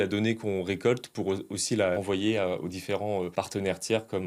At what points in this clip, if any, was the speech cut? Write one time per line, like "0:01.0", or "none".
0:02.0
0:03.3